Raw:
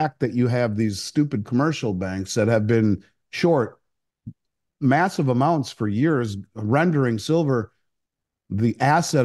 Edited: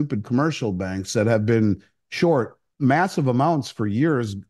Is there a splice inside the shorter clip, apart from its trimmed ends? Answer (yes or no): yes